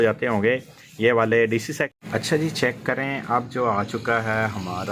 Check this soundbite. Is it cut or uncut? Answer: cut